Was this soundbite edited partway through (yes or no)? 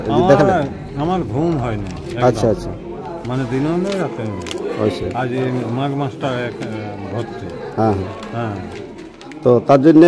no